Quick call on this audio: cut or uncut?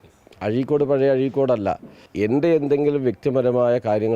cut